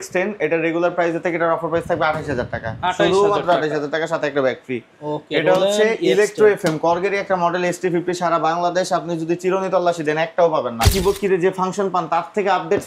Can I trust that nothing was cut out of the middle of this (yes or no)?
no